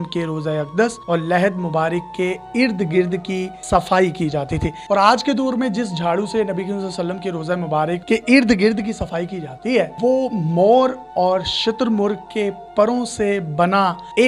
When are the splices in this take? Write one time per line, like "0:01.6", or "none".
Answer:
0:04.8
0:08.0
0:09.9